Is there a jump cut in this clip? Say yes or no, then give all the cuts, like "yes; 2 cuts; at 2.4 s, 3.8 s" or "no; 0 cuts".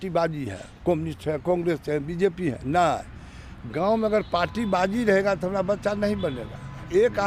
no; 0 cuts